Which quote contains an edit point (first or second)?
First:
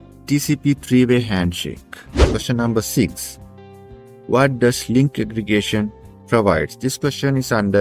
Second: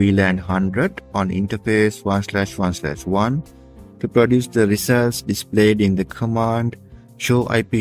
first